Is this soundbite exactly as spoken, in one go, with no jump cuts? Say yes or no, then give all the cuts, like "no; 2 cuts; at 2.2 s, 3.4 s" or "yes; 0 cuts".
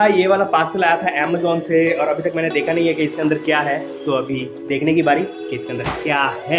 yes; 0 cuts